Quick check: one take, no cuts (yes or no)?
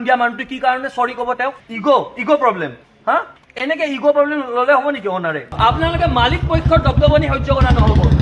no